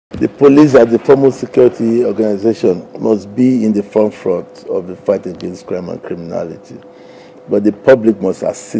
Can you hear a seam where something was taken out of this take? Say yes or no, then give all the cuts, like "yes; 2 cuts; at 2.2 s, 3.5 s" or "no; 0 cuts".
no; 0 cuts